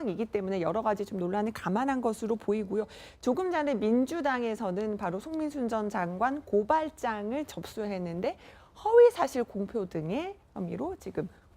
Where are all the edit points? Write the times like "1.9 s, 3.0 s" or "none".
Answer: 3.4 s